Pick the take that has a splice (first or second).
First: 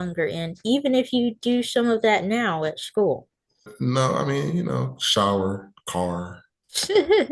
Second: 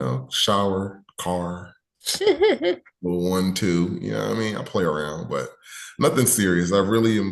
first